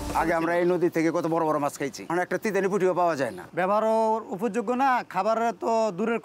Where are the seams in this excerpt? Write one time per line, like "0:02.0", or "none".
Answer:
0:02.1
0:03.4